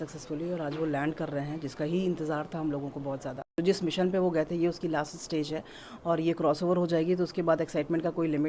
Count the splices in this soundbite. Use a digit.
1